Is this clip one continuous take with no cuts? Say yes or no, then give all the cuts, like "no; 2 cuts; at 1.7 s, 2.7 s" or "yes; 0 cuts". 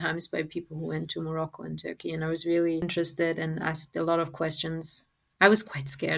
yes; 0 cuts